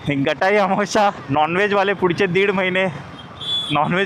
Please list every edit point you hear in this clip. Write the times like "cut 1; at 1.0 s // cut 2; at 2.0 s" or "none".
none

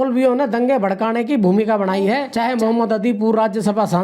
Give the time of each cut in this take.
cut 1; at 2.3 s

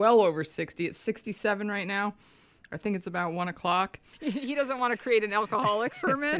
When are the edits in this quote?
cut 1; at 4.1 s

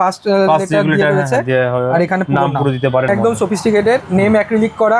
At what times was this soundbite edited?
cut 1; at 3.1 s

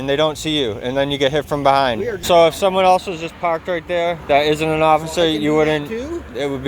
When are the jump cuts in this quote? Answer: cut 1; at 2.2 s

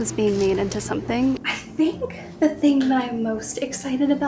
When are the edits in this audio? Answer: cut 1; at 1.4 s

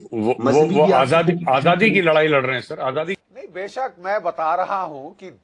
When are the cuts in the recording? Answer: cut 1; at 3.2 s

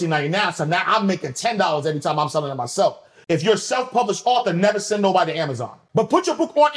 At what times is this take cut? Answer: cut 1; at 3.1 s // cut 2; at 5.8 s

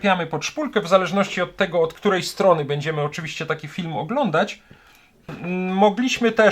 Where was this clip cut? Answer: cut 1; at 5.3 s

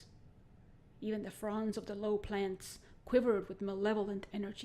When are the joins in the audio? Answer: cut 1; at 3.2 s

